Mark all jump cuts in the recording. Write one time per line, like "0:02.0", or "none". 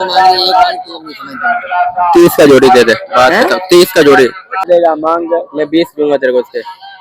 0:04.7